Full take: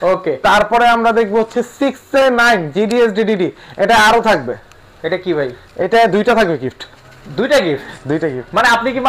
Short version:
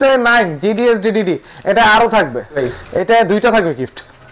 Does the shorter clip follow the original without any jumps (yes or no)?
no